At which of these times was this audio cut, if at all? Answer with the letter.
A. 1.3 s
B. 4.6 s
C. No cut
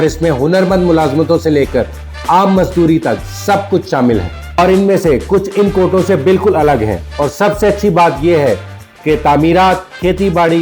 B